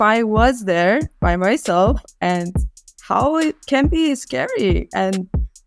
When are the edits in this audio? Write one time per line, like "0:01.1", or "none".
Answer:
none